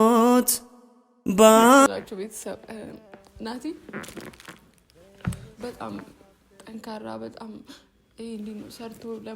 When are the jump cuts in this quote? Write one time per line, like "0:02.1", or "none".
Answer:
0:01.9